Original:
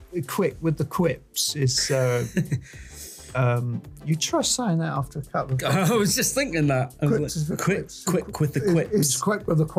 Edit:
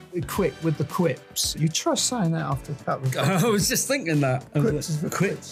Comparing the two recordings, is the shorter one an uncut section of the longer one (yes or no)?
no